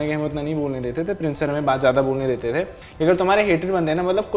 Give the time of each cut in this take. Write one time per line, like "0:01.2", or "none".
0:02.8